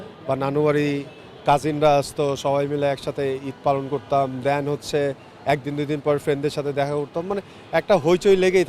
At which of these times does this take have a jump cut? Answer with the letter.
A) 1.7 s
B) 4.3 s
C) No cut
C